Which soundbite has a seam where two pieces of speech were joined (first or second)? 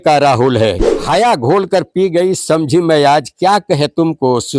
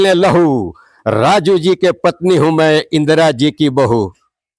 first